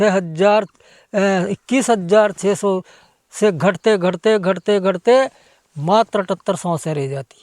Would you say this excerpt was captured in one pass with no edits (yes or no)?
yes